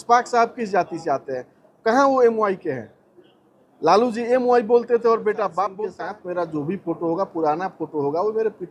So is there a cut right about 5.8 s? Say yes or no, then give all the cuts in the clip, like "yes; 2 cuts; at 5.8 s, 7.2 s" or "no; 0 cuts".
yes; 1 cut; at 5.8 s